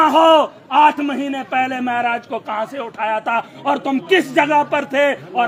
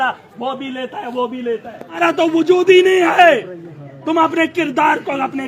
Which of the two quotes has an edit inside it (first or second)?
second